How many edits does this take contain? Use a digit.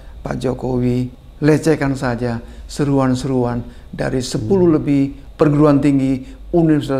2